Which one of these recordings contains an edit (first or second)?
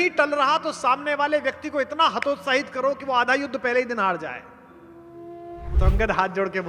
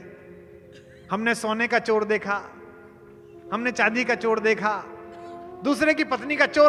first